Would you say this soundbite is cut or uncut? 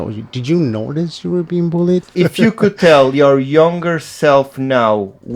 cut